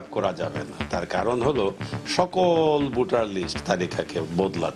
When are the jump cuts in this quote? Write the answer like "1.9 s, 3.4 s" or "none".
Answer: none